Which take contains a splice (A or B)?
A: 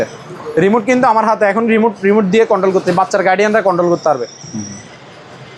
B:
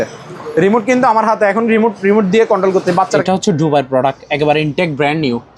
B